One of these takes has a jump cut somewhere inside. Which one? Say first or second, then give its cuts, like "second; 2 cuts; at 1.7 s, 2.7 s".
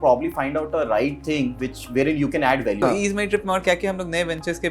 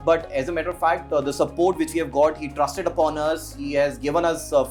first; 1 cut; at 2.8 s